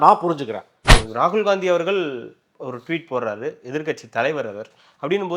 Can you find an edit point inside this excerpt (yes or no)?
yes